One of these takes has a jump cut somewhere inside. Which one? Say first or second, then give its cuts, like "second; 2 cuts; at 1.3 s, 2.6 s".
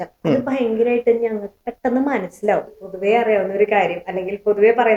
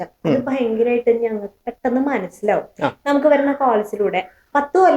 first; 1 cut; at 2.7 s